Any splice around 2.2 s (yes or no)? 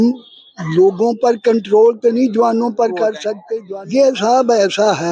no